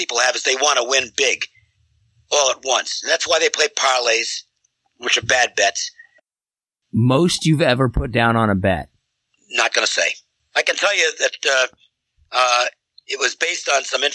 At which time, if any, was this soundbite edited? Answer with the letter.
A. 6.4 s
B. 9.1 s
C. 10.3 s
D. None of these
A